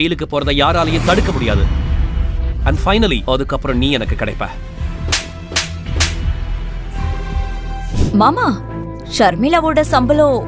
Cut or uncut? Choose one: cut